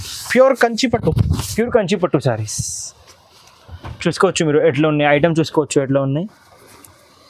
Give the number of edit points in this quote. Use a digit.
0